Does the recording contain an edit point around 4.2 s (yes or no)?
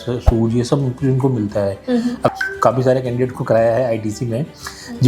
no